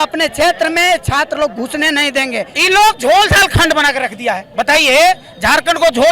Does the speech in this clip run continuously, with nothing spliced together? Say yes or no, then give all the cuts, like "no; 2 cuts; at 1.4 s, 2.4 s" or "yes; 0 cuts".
no; 2 cuts; at 2.5 s, 4.5 s